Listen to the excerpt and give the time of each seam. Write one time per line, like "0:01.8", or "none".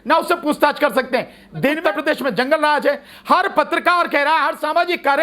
0:01.8